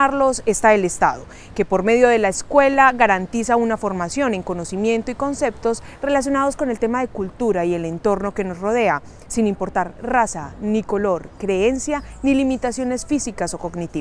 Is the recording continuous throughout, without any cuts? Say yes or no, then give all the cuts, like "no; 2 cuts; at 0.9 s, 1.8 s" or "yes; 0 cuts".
no; 1 cut; at 11.6 s